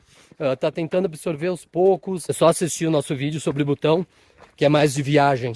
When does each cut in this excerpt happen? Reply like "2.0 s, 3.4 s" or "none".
2.3 s